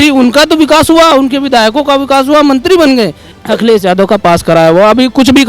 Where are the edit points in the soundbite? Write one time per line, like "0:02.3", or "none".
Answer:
0:03.3